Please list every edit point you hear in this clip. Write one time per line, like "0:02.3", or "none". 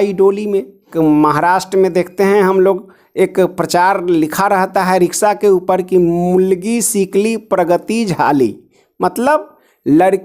0:00.9